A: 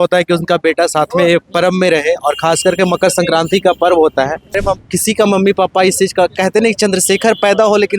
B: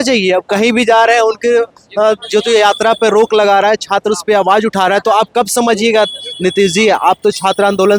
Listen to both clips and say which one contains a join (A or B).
A